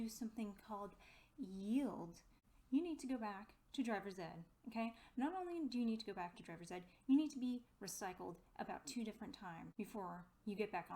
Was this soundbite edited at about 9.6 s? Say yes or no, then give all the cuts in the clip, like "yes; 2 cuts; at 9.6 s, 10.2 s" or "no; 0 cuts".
yes; 2 cuts; at 2.5 s, 9.6 s